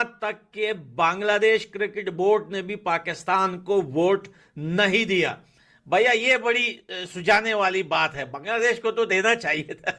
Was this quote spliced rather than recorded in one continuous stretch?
no; 0 cuts

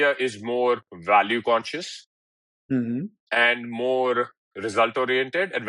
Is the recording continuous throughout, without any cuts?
yes; 0 cuts

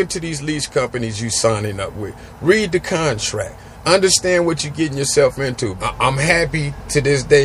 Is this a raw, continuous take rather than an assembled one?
no; 1 cut; at 5.7 s

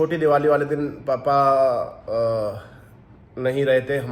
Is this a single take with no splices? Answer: yes; 0 cuts

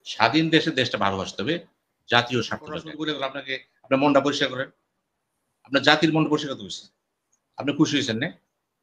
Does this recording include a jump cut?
yes; 1 cut; at 2.9 s

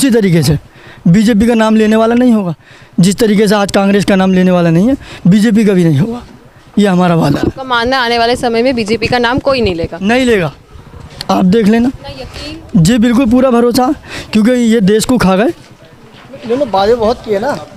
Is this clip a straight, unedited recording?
yes; 0 cuts

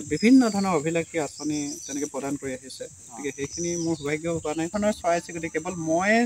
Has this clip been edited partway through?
yes; 1 cut; at 4.7 s

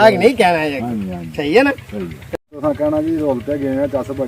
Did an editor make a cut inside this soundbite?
yes; 1 cut; at 2.6 s

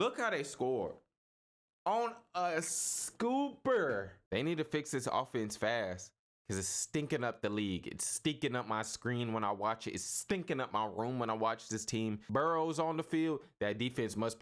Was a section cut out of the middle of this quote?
yes; 2 cuts; at 4.2 s, 12.2 s

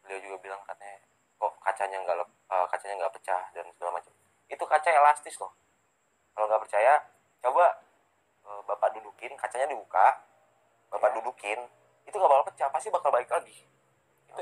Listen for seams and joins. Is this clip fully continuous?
yes; 0 cuts

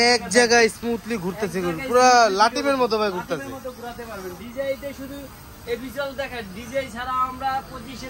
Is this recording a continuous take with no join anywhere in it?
yes; 0 cuts

